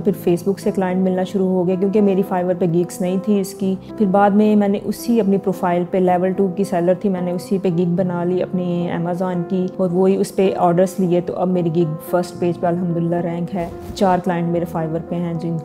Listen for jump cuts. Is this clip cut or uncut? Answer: cut